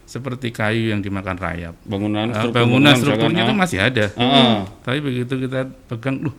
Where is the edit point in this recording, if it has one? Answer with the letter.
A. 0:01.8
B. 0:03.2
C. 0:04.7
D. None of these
A